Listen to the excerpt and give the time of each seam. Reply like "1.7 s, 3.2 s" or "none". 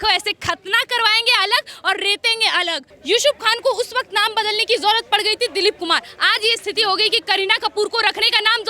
2.9 s